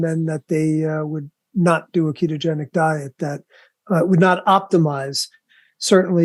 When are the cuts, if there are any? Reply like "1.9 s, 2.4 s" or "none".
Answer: none